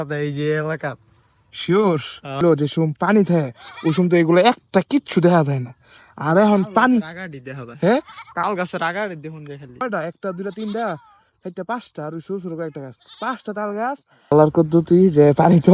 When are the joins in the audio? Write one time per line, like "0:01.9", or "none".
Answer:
0:02.4
0:09.8
0:14.3